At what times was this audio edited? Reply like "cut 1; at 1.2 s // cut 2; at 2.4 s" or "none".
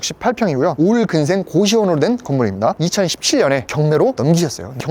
cut 1; at 2.8 s // cut 2; at 3.7 s